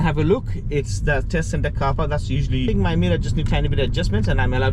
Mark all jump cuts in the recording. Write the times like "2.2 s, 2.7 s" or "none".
2.7 s